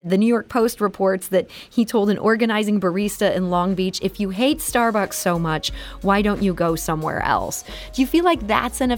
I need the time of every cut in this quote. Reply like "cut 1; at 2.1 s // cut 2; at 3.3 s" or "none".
none